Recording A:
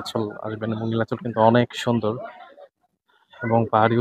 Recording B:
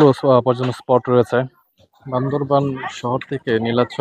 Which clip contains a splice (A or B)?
B